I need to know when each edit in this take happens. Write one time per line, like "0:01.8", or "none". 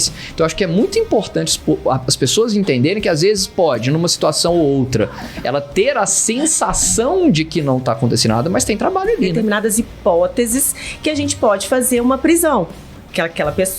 0:09.3